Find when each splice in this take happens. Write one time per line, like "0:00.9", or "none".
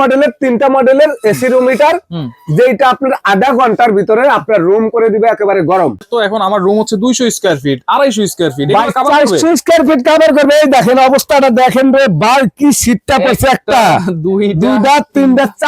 0:06.0